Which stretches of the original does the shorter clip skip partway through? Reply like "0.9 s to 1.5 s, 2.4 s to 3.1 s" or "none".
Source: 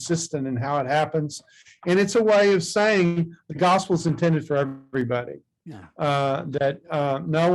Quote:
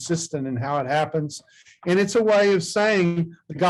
none